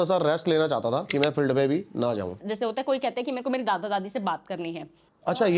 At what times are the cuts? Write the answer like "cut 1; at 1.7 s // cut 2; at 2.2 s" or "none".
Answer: cut 1; at 1.1 s // cut 2; at 2.3 s